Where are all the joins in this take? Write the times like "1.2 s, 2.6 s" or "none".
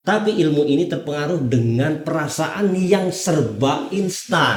none